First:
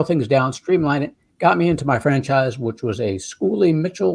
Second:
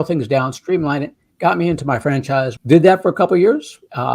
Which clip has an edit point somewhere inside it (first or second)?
second